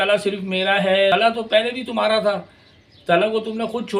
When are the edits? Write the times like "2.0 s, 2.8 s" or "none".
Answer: 1.1 s